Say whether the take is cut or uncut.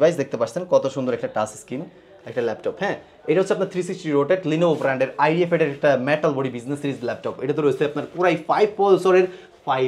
uncut